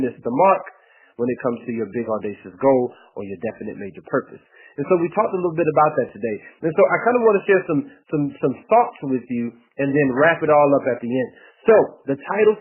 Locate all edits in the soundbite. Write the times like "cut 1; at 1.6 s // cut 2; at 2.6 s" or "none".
cut 1; at 6.2 s